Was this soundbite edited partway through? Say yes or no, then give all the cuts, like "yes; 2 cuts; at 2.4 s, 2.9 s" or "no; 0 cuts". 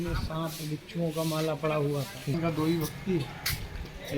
yes; 1 cut; at 2.3 s